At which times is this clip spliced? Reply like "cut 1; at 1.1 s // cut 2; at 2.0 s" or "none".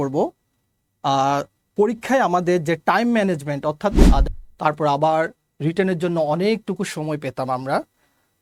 cut 1; at 4.2 s